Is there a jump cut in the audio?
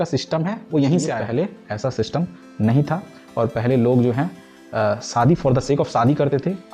yes; 1 cut; at 1.2 s

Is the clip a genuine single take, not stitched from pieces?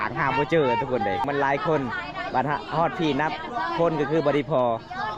no; 1 cut; at 1.2 s

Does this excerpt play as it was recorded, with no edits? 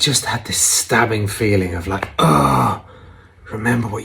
yes; 0 cuts

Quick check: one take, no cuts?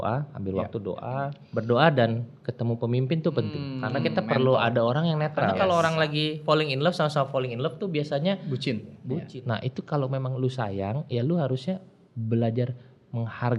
no; 4 cuts; at 1.4 s, 3.6 s, 5.5 s, 9.3 s

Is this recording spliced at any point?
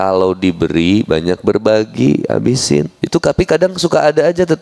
yes; 1 cut; at 3.0 s

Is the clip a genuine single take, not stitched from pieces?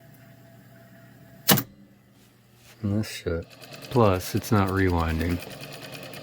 no; 1 cut; at 3.7 s

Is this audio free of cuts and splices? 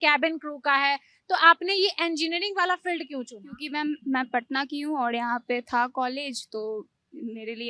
yes; 0 cuts

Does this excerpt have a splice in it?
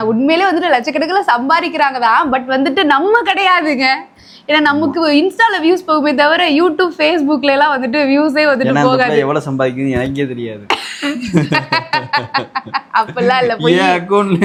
no; 0 cuts

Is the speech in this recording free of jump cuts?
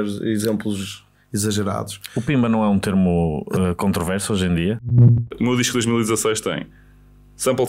no; 1 cut; at 5.2 s

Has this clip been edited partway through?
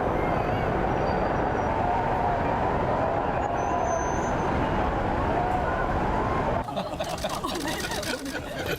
no; 0 cuts

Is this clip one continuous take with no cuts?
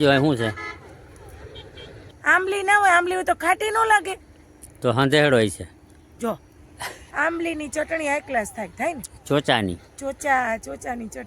no; 2 cuts; at 2.2 s, 6.9 s

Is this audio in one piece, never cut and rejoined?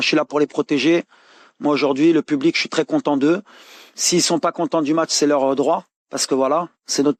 yes; 0 cuts

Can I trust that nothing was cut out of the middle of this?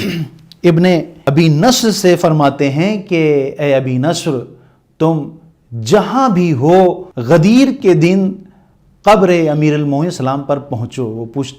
no; 2 cuts; at 1.1 s, 7.1 s

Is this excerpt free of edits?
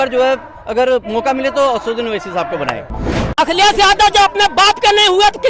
no; 1 cut; at 2.9 s

